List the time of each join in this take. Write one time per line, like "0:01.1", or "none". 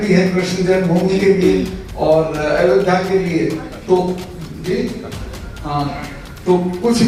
none